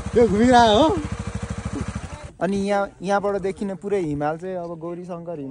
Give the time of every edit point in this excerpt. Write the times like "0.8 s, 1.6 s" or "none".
2.2 s